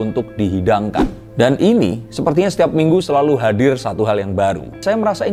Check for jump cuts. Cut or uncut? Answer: uncut